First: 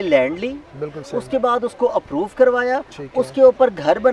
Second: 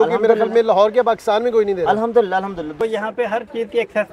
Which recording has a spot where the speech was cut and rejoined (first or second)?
second